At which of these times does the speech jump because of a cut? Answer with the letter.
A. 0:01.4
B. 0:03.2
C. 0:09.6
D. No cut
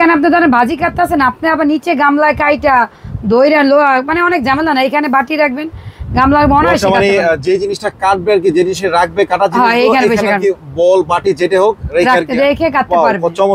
D